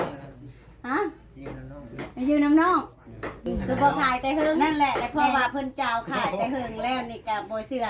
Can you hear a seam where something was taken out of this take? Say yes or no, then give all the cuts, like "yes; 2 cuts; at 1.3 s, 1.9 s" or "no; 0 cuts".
yes; 1 cut; at 3.6 s